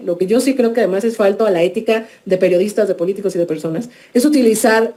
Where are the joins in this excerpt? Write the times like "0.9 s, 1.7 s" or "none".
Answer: none